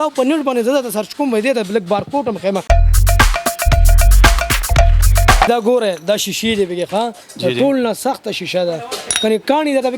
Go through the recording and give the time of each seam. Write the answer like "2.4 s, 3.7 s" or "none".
2.6 s, 5.5 s